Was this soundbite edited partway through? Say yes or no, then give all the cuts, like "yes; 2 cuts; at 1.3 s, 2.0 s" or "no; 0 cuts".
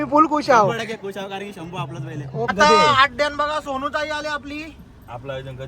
yes; 1 cut; at 2.5 s